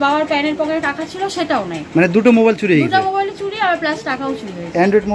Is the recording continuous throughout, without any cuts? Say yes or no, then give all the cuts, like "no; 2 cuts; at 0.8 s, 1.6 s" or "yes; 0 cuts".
yes; 0 cuts